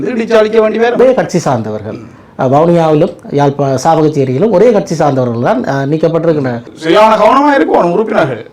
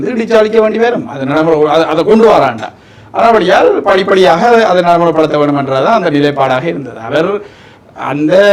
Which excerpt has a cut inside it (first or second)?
first